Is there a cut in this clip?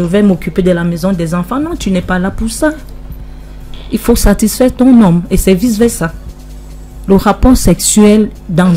no; 0 cuts

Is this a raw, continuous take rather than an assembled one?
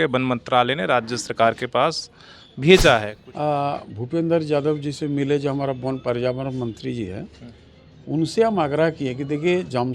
no; 1 cut; at 3.2 s

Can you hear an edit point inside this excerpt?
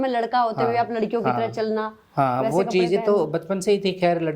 no; 0 cuts

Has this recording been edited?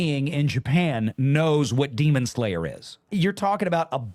yes; 1 cut; at 2.9 s

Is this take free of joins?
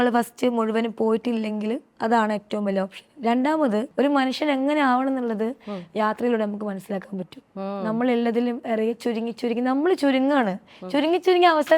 no; 1 cut; at 3.9 s

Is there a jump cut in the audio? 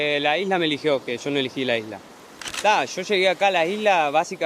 yes; 1 cut; at 2.5 s

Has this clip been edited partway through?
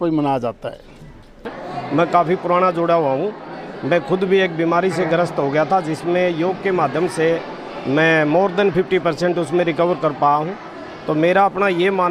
yes; 1 cut; at 1.7 s

